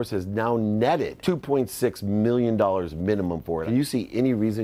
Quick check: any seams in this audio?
yes; 2 cuts; at 1.1 s, 3.6 s

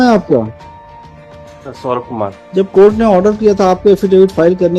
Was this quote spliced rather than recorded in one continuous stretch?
yes; 1 cut; at 2.4 s

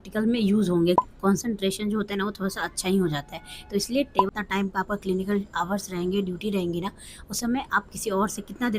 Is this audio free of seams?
no; 2 cuts; at 1.0 s, 4.3 s

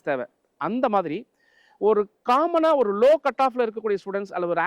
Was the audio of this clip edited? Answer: no; 0 cuts

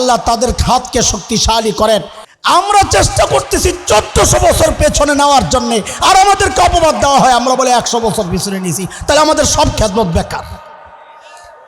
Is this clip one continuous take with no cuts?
no; 1 cut; at 2.2 s

